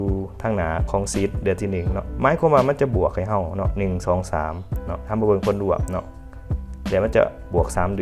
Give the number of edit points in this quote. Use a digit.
0